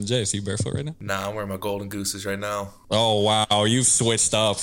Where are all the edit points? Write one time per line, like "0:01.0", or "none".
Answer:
0:01.0
0:02.8